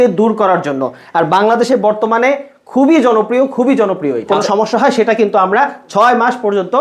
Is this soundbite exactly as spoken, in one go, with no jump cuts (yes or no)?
no